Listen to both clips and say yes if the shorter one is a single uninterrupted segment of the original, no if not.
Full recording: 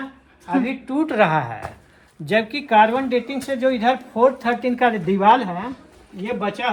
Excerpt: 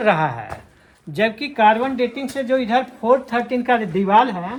yes